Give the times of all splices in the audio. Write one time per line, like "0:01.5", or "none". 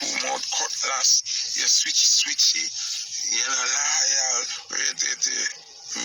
none